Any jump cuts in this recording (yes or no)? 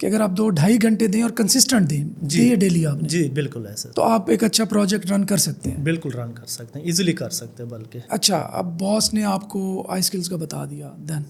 no